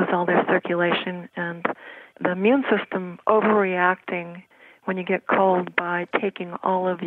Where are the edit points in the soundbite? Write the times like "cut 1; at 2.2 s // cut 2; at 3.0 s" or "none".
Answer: cut 1; at 2.1 s